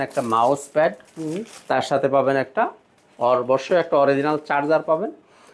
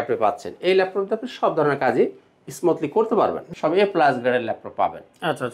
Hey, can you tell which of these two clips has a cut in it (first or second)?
second